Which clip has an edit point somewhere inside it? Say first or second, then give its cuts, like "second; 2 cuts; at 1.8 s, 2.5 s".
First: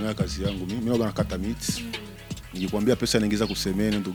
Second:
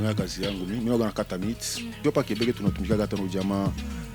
second; 1 cut; at 2.0 s